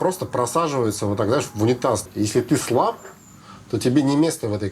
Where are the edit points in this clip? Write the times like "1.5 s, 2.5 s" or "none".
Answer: 2.1 s